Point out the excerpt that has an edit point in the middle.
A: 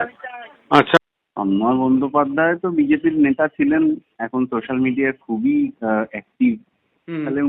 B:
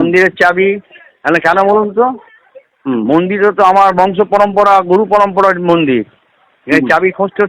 A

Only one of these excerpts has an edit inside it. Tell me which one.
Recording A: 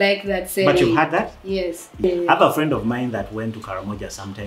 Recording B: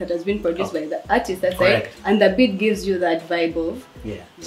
A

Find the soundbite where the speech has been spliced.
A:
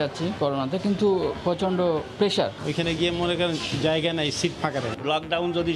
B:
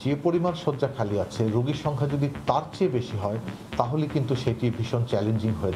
A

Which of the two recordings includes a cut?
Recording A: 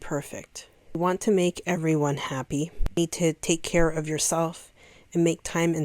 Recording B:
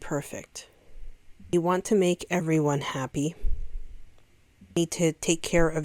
A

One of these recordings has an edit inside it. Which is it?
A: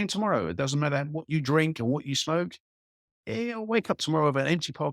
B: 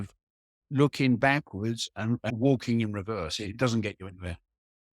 B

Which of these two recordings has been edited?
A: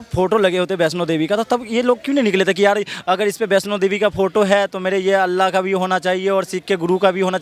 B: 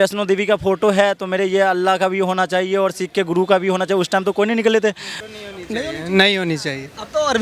B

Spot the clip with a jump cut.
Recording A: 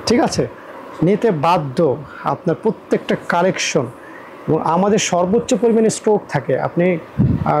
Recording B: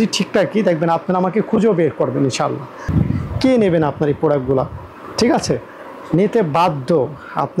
B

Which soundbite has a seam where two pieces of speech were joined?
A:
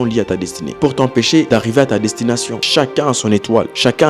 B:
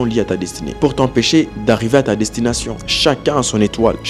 A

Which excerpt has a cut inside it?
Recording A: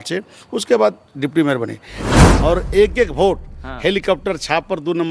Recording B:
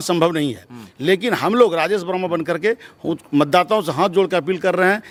A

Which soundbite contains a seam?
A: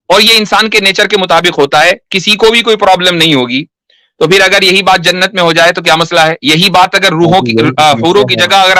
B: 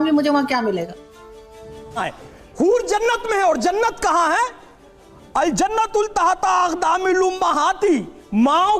B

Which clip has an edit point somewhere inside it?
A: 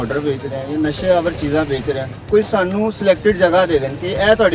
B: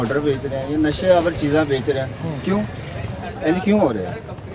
A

